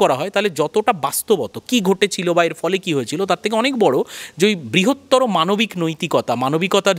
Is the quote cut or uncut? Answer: uncut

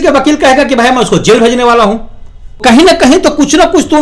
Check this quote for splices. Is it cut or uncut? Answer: cut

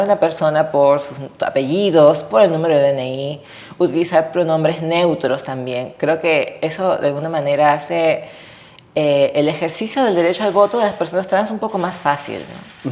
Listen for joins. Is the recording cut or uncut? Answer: uncut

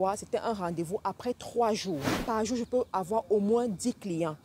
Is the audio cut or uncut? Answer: cut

